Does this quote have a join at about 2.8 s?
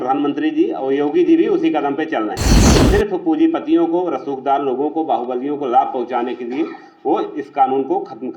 no; 0 cuts

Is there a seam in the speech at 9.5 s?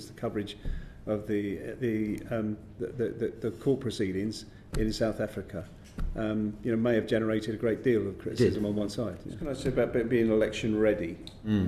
yes; 1 cut; at 9.5 s

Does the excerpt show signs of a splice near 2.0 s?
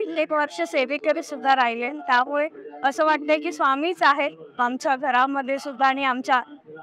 no; 0 cuts

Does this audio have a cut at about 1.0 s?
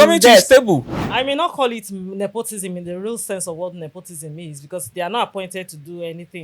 yes; 1 cut; at 1.0 s

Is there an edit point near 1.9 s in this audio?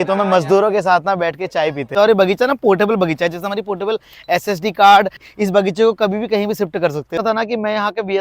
yes; 3 cuts; at 1.9 s, 5.2 s, 7.2 s

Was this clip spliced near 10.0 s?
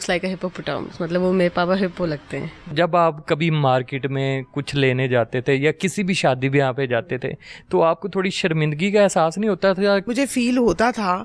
yes; 2 cuts; at 2.7 s, 10.0 s

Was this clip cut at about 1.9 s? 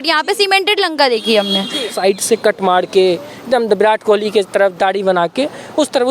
yes; 1 cut; at 1.9 s

